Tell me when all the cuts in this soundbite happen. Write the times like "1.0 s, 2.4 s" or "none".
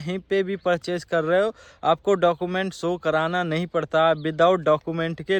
none

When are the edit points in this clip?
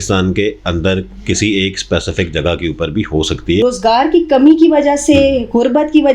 3.6 s

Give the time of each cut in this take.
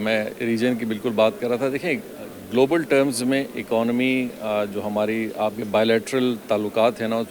none

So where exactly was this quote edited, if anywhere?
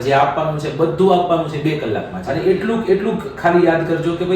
2.2 s

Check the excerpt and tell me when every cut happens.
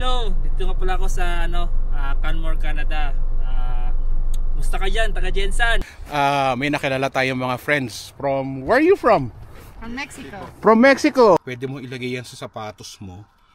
5.9 s, 11.5 s

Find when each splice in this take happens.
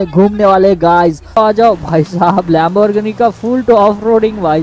1.4 s

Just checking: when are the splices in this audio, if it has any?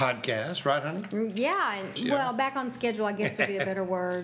1.9 s

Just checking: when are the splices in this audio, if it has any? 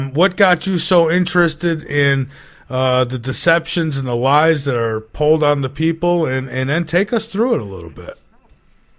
none

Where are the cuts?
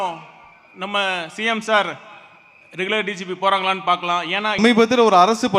4.6 s

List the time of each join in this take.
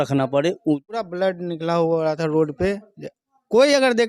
1.0 s

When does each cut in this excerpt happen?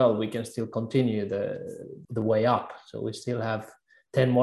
2.0 s

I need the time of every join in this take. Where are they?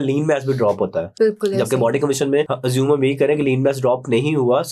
1.0 s, 2.5 s

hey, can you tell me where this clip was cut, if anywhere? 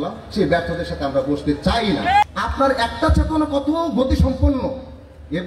2.2 s

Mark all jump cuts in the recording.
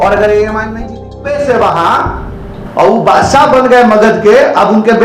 1.0 s

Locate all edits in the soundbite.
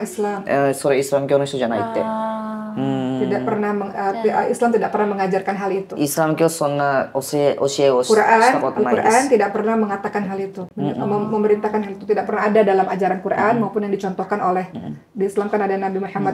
none

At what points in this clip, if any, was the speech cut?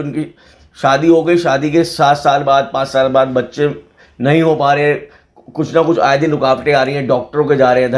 none

